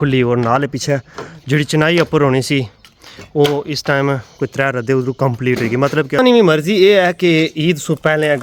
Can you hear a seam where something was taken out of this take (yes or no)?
yes